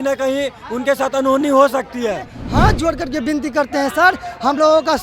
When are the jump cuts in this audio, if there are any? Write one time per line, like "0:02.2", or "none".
0:02.4